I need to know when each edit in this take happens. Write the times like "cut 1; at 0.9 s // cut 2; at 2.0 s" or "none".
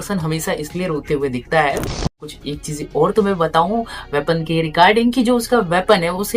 cut 1; at 2.3 s